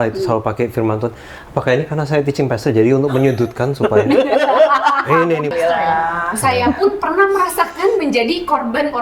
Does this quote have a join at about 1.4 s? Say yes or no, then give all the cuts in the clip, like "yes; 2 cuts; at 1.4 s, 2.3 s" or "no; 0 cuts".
no; 1 cut; at 5.6 s